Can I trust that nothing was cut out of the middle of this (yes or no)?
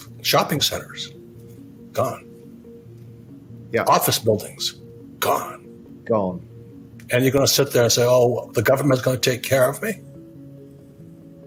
yes